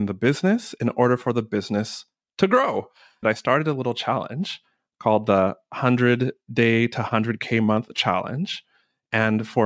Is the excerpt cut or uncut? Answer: cut